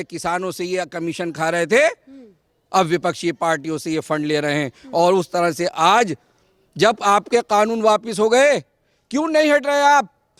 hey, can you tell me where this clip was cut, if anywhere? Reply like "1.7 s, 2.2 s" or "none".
none